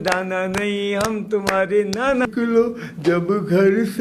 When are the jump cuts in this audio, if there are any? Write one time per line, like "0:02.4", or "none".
0:02.3

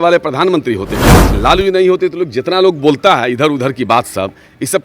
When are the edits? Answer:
0:01.3

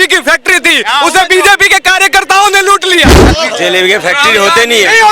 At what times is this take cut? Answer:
0:03.2

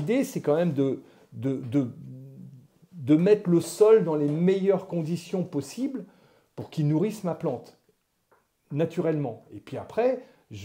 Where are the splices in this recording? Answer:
none

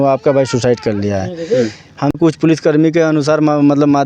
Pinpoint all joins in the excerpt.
0:02.3

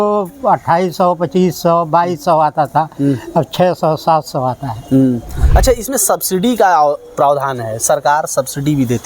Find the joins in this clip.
0:05.4

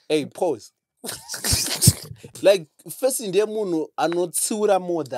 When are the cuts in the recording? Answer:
0:02.3

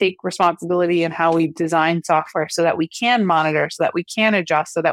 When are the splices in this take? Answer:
none

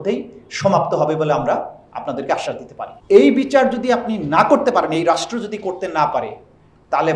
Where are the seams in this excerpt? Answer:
0:02.9

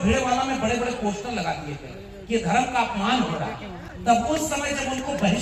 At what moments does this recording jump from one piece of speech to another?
none

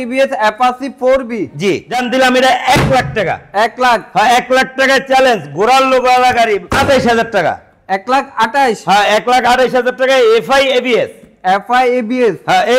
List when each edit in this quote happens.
0:01.9
0:06.7

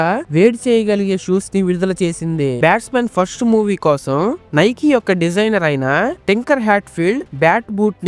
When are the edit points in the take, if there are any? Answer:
0:02.6

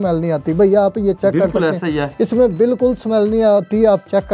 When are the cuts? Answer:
none

